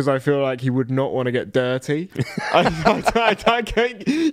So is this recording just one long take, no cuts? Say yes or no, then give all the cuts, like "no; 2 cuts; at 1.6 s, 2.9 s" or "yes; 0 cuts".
no; 1 cut; at 2.2 s